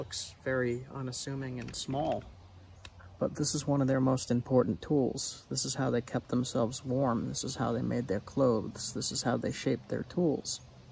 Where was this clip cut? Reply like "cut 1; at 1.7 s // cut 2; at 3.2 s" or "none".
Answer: none